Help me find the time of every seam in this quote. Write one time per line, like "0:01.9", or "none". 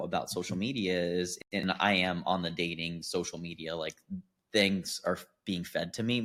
none